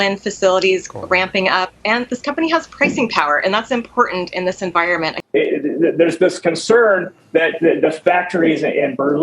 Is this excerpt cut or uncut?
cut